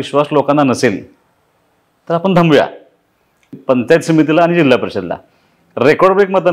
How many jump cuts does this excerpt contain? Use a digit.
1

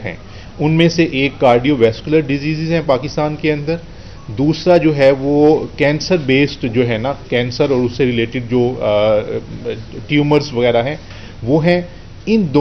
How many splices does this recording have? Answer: 0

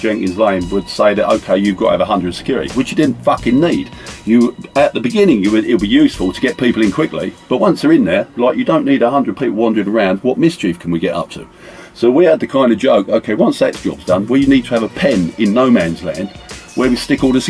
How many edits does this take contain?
0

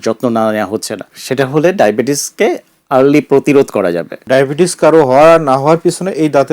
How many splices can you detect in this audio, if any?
2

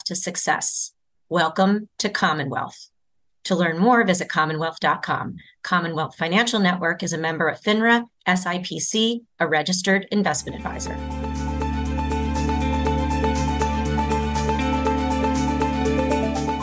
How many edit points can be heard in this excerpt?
1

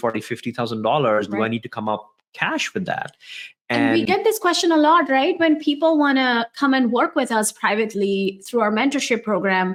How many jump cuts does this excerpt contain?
0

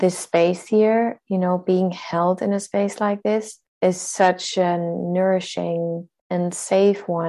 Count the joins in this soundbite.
2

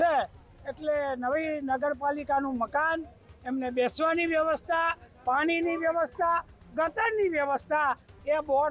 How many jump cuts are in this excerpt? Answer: 0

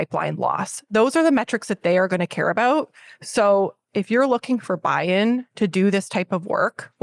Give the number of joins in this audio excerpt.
0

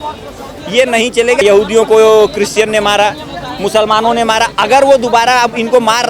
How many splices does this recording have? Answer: 1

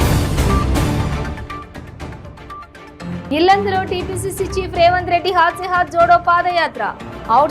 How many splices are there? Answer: 1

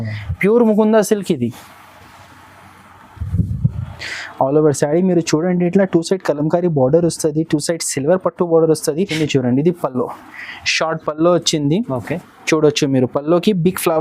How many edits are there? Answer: 1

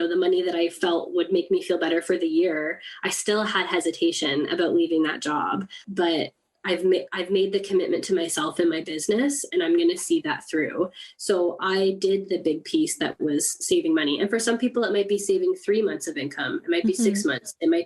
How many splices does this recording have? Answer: 1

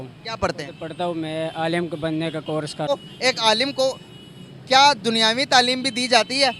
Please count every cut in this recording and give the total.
1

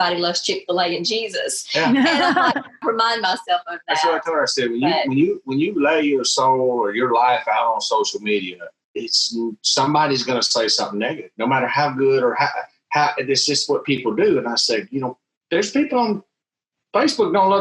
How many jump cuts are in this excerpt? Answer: 1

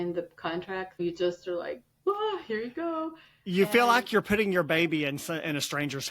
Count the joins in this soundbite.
1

